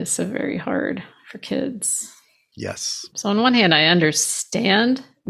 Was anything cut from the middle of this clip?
yes; 1 cut; at 3.1 s

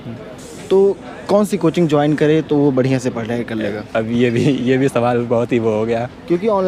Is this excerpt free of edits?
yes; 0 cuts

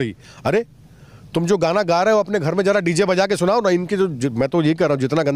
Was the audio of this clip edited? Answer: no; 0 cuts

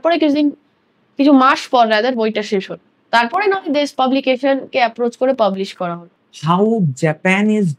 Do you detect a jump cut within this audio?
yes; 1 cut; at 6.1 s

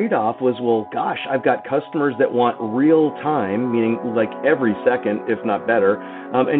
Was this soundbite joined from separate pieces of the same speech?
no; 0 cuts

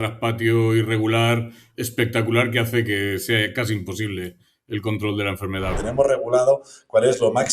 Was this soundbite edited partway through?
yes; 1 cut; at 5.7 s

